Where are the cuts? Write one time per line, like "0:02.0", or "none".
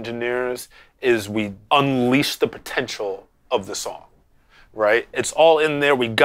0:01.6

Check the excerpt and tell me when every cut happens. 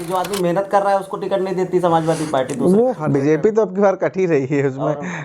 0:03.0

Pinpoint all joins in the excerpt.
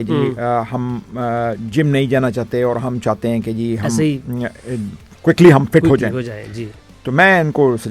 none

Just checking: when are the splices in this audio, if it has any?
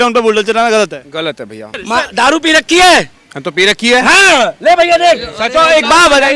0:01.8

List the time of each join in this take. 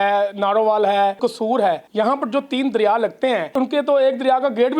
0:01.4
0:03.5

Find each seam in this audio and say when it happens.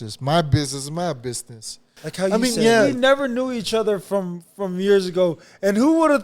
0:02.3

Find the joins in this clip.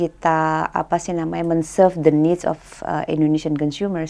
none

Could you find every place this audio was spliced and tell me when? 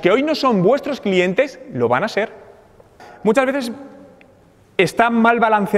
0:03.0

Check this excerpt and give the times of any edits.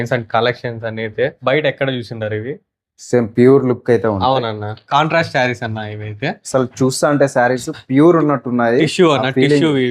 0:01.4
0:04.8

